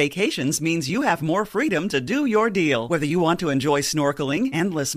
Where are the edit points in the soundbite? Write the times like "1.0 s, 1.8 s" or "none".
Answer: none